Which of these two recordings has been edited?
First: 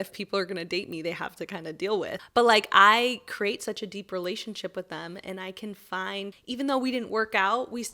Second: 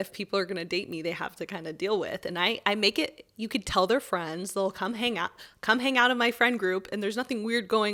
first; 2 cuts; at 2.2 s, 6.4 s

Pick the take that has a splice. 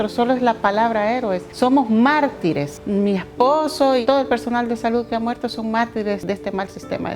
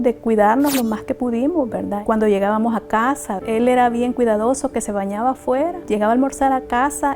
first; 4 cuts; at 1.4 s, 2.8 s, 4.0 s, 6.2 s

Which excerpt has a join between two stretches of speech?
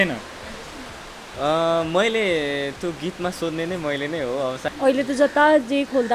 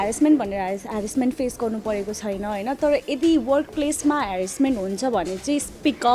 first; 1 cut; at 4.6 s

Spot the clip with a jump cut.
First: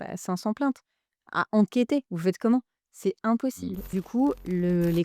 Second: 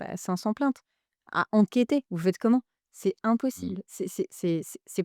first; 1 cut; at 3.9 s

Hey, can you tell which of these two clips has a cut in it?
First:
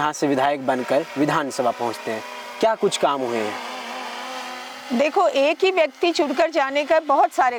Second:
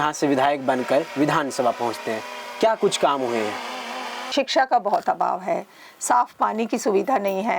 second; 1 cut; at 4.2 s

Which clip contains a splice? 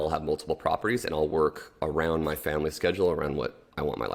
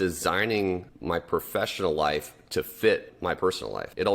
second; 2 cuts; at 0.9 s, 3.4 s

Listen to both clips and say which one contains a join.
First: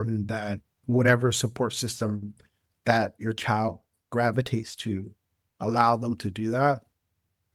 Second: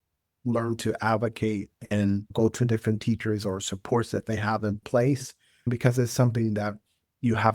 second; 1 cut; at 5.7 s

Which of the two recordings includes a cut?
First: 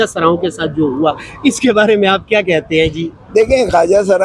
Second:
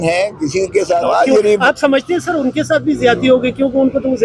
second; 1 cut; at 1.0 s

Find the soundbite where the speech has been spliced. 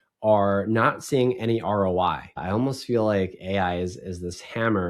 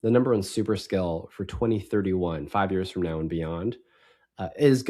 first; 1 cut; at 2.4 s

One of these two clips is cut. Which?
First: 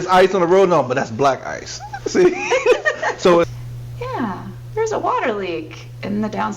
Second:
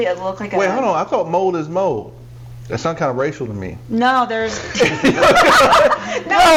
first; 1 cut; at 3.4 s

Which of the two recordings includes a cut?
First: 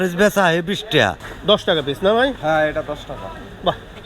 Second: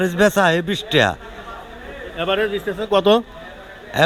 first; 1 cut; at 1.3 s

